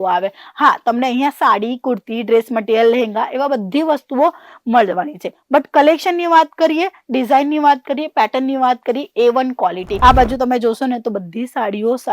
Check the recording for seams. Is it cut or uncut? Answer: cut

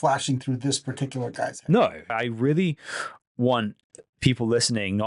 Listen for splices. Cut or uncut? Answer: cut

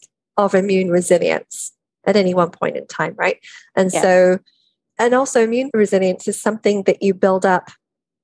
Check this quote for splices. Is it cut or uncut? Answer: cut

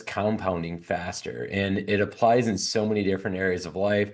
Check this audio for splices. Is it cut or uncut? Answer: uncut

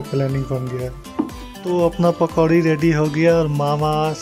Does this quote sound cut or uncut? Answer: cut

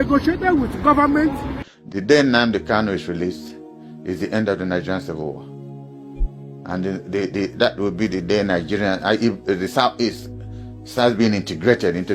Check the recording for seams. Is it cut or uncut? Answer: cut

